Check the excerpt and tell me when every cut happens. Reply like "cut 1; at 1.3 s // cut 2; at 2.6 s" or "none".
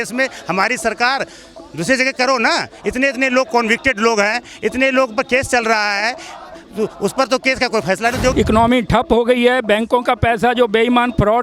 cut 1; at 8.3 s